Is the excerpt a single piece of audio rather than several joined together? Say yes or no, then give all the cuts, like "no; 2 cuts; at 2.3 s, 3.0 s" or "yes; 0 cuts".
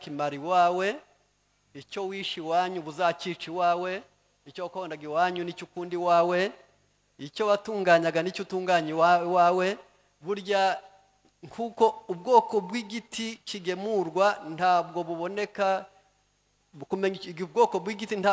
yes; 0 cuts